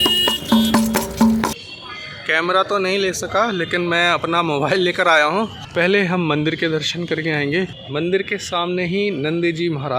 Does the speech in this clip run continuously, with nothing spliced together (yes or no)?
no